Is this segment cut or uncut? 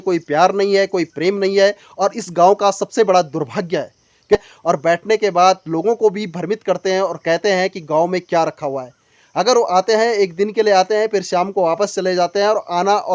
cut